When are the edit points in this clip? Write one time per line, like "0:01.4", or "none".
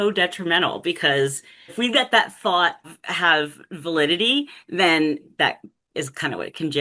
0:01.8
0:03.0
0:05.2